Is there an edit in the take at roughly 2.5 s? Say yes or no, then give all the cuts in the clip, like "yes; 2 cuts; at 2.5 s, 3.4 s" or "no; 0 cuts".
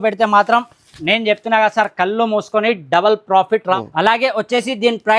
no; 1 cut; at 3.8 s